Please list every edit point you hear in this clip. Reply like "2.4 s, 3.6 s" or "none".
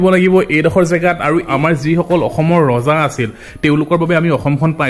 1.5 s